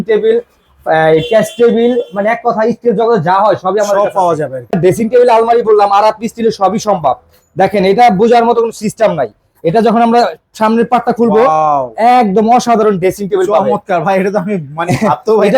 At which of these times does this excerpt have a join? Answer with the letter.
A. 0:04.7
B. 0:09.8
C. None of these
A